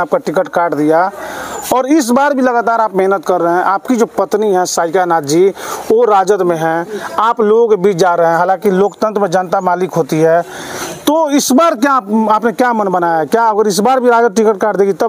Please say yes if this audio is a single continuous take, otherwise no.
yes